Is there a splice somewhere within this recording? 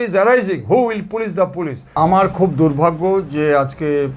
yes; 1 cut; at 2.0 s

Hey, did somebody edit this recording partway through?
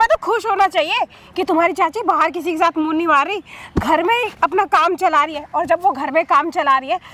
no; 0 cuts

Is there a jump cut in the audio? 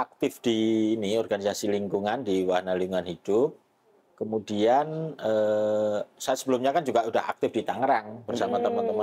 no; 0 cuts

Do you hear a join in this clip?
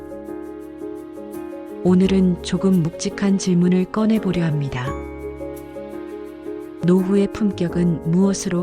yes; 3 cuts; at 1.5 s, 5.0 s, 6.8 s

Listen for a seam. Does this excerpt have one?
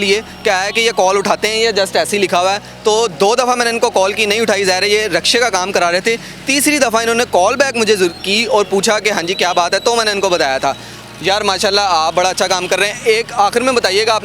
no; 0 cuts

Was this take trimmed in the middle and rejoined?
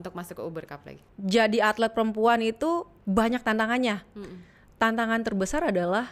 yes; 1 cut; at 1.0 s

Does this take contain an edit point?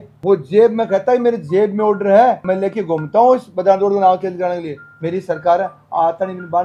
no; 0 cuts

